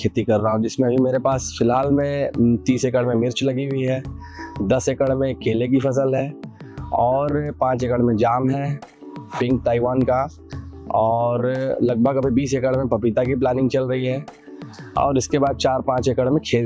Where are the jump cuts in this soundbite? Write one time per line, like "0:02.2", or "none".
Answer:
none